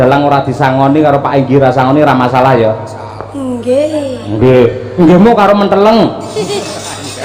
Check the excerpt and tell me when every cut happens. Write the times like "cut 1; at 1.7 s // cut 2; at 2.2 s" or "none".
none